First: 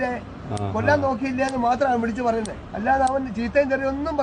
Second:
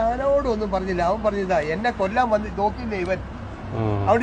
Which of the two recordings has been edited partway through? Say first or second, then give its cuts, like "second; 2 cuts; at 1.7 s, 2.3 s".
first; 1 cut; at 2.6 s